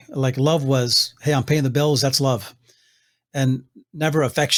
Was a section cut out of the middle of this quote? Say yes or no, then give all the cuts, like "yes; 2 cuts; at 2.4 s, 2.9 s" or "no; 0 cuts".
no; 0 cuts